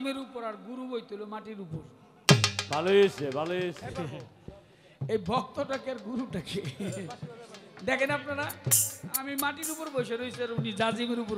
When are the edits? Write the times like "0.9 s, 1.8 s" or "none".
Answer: 3.8 s